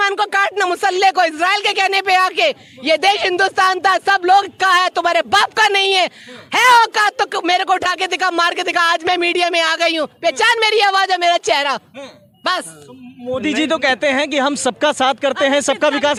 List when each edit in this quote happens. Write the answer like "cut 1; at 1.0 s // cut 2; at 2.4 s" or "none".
none